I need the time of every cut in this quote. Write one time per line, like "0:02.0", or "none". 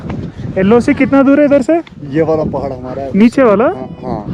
0:02.0